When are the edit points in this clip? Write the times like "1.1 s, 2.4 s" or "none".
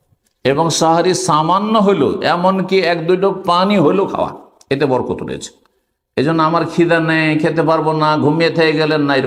none